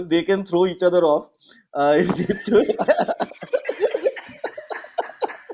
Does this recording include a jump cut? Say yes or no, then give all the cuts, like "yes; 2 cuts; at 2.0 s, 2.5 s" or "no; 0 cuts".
no; 0 cuts